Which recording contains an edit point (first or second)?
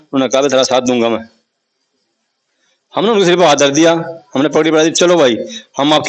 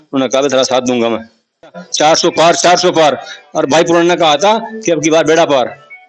second